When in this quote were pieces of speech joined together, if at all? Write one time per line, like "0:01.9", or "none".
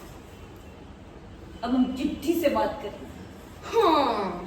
none